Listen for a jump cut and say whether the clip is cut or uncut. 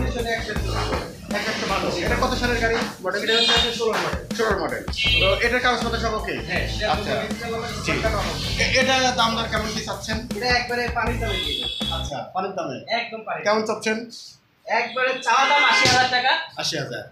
uncut